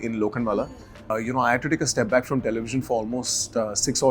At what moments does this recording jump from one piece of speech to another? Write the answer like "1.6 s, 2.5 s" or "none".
1.1 s